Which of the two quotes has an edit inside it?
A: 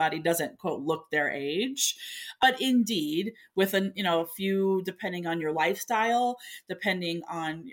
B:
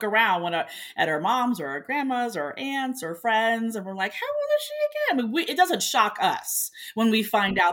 A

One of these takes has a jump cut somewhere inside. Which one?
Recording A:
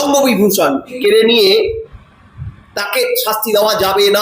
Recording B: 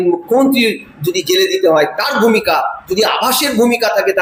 A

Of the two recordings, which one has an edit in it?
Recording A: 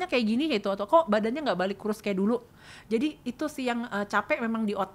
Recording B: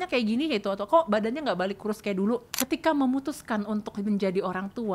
B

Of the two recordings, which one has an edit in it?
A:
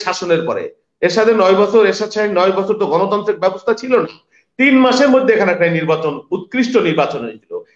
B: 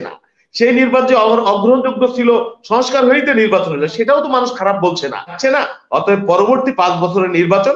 B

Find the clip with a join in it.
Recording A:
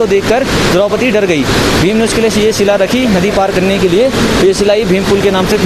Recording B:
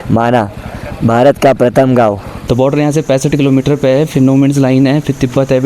B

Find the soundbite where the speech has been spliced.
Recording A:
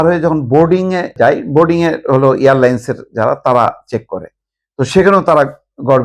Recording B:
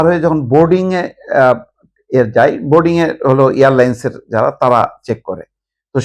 A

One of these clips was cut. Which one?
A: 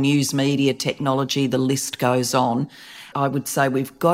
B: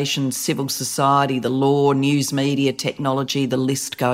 A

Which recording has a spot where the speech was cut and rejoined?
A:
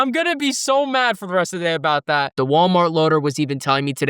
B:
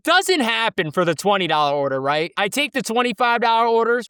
A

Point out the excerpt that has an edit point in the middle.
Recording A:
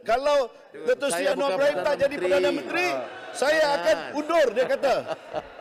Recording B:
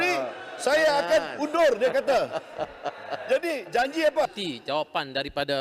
B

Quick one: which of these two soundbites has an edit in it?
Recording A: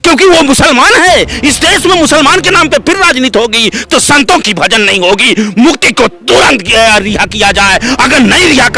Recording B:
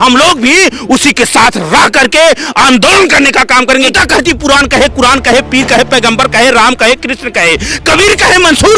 B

